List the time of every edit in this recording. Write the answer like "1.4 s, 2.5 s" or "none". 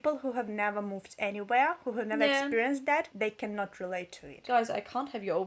3.1 s, 4.4 s